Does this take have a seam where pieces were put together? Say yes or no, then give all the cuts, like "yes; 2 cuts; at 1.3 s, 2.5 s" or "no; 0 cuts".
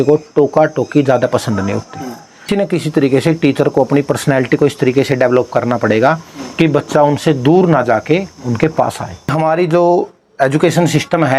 yes; 2 cuts; at 2.5 s, 9.3 s